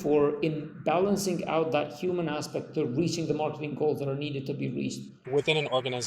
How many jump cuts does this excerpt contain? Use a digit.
1